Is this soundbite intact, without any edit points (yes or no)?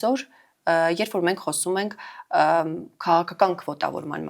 yes